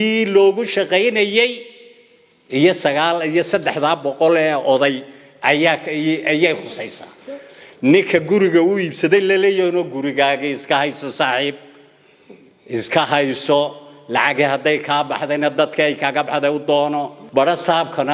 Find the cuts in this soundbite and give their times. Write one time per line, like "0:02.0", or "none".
0:17.2